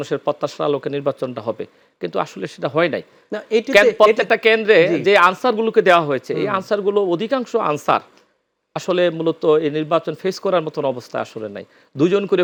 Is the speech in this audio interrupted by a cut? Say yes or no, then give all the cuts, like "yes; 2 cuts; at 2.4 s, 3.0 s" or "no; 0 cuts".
no; 0 cuts